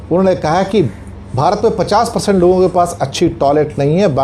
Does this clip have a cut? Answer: yes; 1 cut; at 0.9 s

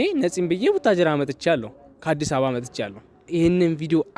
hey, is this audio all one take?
no; 1 cut; at 3.3 s

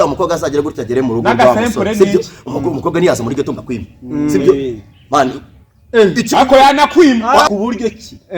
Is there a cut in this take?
yes; 1 cut; at 7.5 s

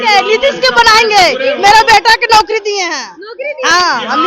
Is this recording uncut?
yes; 0 cuts

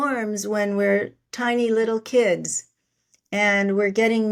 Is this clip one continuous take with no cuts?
yes; 0 cuts

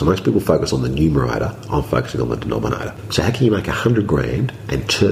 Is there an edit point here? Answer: yes; 1 cut; at 3.0 s

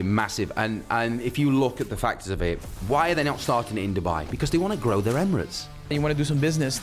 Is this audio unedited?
no; 1 cut; at 5.9 s

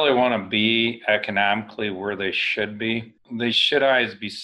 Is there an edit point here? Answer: yes; 1 cut; at 3.2 s

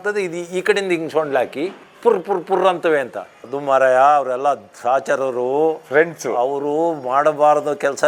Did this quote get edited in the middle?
no; 0 cuts

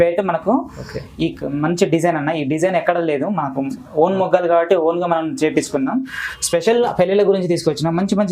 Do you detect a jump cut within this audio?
yes; 1 cut; at 6.1 s

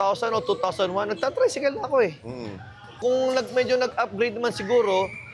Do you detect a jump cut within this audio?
yes; 1 cut; at 2.8 s

